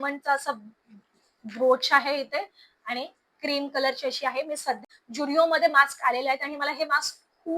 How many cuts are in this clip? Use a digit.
1